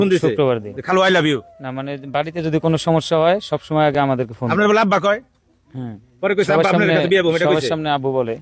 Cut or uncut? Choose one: uncut